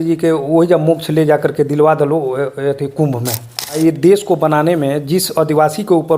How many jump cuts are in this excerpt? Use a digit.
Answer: 1